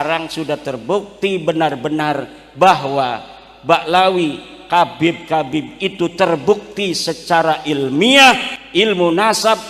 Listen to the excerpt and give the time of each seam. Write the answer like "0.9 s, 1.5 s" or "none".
8.5 s

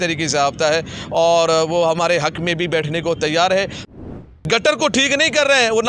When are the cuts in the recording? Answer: 4.1 s

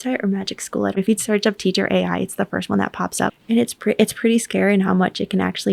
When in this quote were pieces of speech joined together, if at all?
0.9 s, 3.3 s

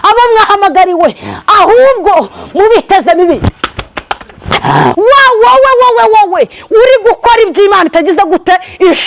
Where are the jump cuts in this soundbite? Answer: 4.9 s

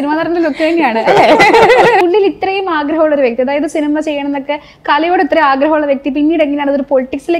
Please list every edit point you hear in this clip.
2.0 s

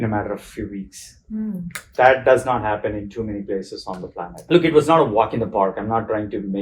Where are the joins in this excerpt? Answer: 4.3 s

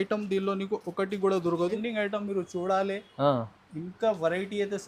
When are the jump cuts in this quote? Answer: 1.8 s

